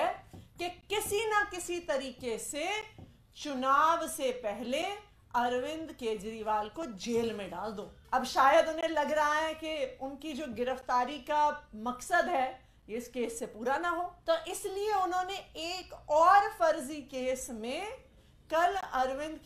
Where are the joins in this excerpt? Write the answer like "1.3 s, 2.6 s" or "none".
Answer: 7.9 s, 14.2 s